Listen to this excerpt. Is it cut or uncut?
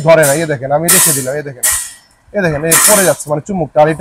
uncut